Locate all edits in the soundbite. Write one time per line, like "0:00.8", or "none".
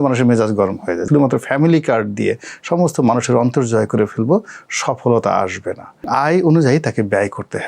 0:01.0
0:06.1